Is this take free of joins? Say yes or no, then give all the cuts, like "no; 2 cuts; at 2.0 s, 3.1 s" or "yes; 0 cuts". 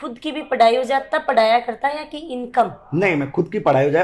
yes; 0 cuts